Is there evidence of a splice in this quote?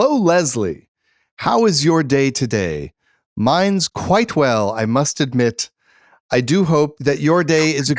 yes; 1 cut; at 6.9 s

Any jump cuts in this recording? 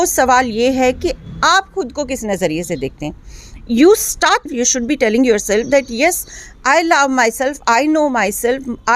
no; 0 cuts

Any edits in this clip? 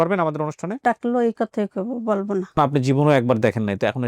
yes; 2 cuts; at 0.8 s, 2.6 s

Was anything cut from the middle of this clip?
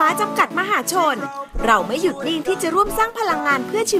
no; 0 cuts

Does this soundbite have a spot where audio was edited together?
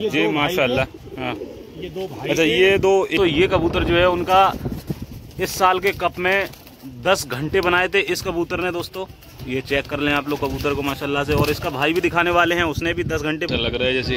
yes; 2 cuts; at 3.1 s, 13.5 s

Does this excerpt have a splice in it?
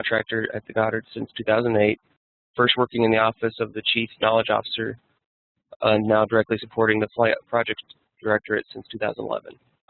yes; 1 cut; at 5.2 s

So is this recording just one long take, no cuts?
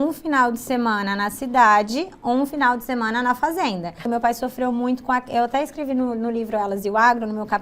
no; 1 cut; at 4.1 s

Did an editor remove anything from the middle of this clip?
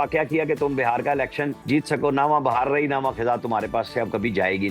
yes; 1 cut; at 1.6 s

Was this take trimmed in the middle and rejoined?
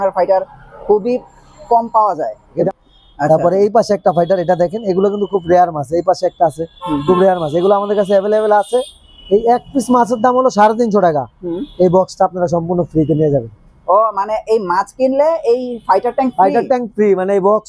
yes; 1 cut; at 2.7 s

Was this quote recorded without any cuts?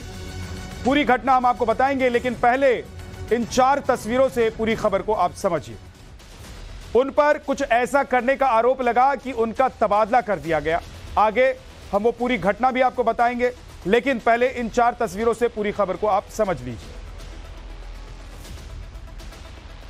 yes; 0 cuts

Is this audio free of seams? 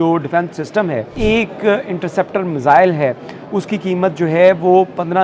no; 1 cut; at 1.1 s

